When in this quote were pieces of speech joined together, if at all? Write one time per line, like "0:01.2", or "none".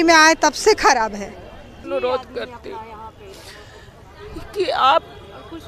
0:01.8